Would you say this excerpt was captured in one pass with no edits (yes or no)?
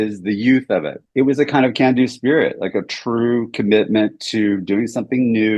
no